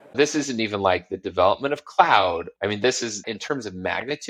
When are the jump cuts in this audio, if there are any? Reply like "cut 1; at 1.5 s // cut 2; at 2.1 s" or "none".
none